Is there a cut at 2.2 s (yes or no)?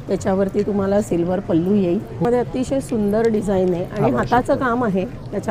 yes